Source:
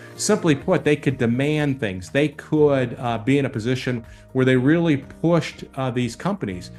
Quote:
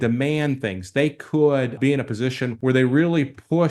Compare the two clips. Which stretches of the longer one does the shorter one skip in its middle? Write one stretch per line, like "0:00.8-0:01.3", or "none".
0:03.2-0:03.8